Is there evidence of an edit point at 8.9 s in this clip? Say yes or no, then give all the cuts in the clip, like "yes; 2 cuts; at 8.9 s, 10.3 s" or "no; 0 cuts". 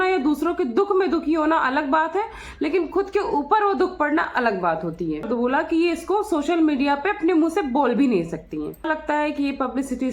yes; 2 cuts; at 5.3 s, 8.9 s